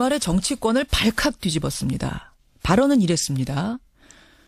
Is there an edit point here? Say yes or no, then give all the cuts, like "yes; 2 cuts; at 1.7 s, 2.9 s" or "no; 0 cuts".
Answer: no; 0 cuts